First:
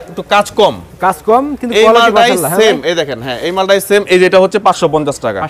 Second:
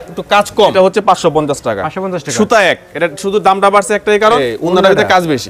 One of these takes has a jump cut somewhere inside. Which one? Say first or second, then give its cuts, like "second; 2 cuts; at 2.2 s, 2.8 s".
second; 2 cuts; at 0.7 s, 4.4 s